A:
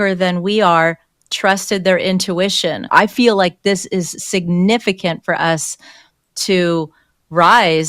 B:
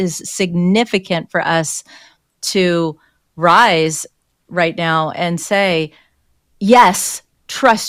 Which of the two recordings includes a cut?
A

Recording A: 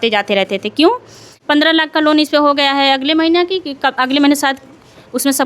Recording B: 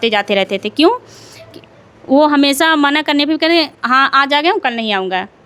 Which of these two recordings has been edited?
A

